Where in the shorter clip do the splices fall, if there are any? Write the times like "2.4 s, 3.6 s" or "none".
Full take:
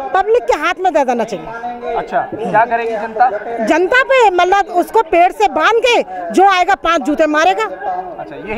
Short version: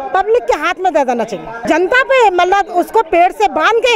1.6 s